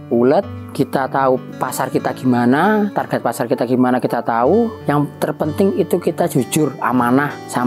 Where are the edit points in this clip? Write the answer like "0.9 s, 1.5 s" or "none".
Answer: 4.8 s